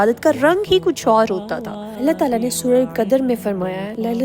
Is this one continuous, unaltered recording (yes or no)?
yes